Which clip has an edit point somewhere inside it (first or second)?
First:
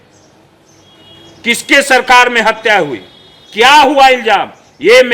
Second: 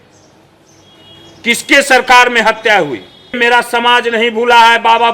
second